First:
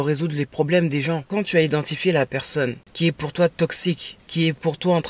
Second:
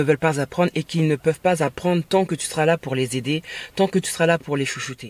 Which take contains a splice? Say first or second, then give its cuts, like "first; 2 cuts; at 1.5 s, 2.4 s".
first; 3 cuts; at 1.2 s, 2.8 s, 4.2 s